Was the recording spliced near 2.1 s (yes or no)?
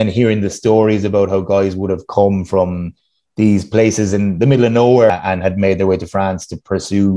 no